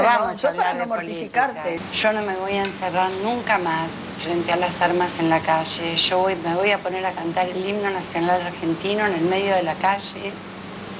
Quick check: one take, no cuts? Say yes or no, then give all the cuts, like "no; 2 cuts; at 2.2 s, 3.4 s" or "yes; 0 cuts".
no; 1 cut; at 1.8 s